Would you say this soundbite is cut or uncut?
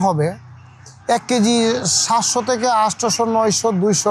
uncut